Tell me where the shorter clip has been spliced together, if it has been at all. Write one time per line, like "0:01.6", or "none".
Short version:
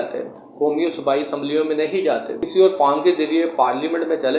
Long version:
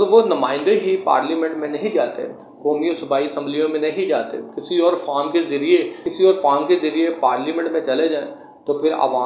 0:02.4